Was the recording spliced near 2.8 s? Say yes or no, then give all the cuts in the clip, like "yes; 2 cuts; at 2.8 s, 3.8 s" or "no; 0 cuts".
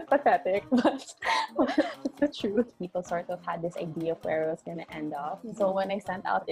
yes; 1 cut; at 2.8 s